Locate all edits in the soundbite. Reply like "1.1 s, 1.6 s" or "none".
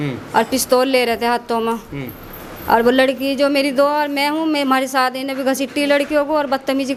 none